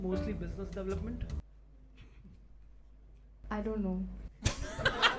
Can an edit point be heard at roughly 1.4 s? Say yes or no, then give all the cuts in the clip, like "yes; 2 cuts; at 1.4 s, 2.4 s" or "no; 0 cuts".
yes; 1 cut; at 1.4 s